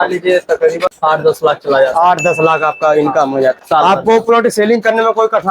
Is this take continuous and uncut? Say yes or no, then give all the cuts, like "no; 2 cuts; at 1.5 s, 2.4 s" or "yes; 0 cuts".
no; 2 cuts; at 0.9 s, 3.6 s